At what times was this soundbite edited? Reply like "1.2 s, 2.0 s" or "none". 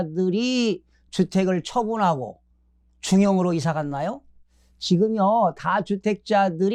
none